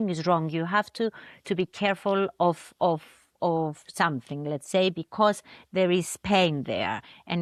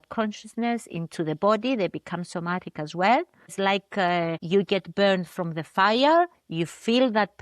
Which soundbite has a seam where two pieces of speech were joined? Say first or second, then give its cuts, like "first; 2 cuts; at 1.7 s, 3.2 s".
second; 2 cuts; at 3.5 s, 4.4 s